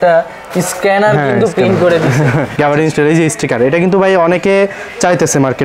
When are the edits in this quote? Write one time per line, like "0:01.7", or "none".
0:02.5